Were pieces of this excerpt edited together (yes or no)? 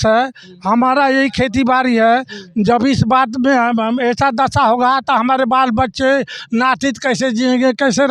no